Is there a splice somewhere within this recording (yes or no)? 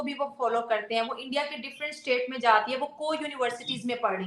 no